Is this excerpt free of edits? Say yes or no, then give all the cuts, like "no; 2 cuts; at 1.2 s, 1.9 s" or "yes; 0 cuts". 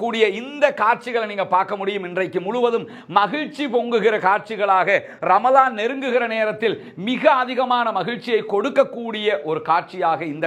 yes; 0 cuts